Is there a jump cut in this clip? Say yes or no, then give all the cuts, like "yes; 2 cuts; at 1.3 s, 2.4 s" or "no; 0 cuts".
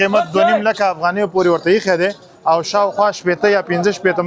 no; 0 cuts